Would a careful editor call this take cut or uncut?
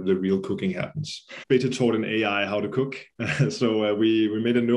cut